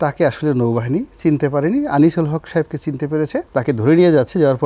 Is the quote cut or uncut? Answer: cut